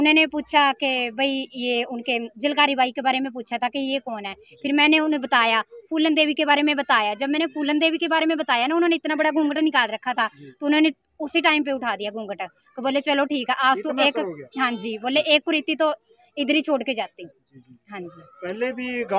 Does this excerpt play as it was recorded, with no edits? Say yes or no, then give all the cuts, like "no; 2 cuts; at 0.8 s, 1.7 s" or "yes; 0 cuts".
yes; 0 cuts